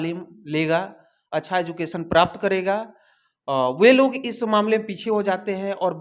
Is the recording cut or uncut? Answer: uncut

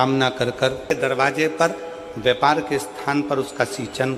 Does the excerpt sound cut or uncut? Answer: cut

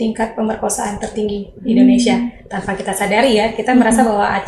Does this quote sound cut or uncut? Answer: uncut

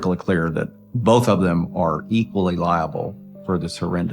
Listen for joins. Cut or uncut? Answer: cut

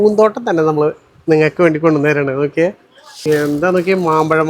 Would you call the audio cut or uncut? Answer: cut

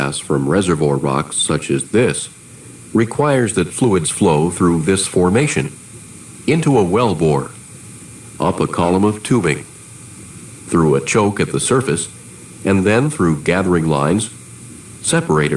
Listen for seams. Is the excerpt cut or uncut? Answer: cut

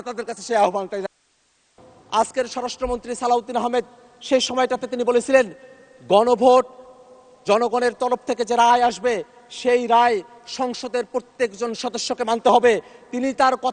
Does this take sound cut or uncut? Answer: cut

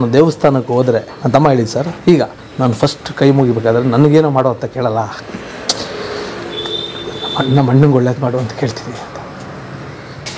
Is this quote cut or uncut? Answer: cut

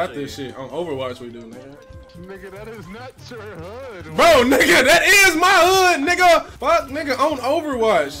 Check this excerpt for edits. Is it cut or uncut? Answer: uncut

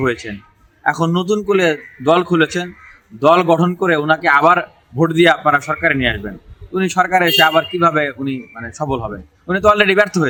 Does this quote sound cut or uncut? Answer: uncut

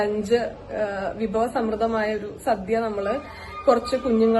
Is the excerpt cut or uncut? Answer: uncut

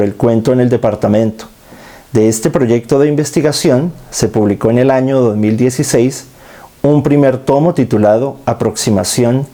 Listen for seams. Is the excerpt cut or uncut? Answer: uncut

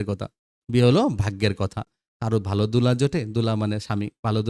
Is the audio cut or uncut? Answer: uncut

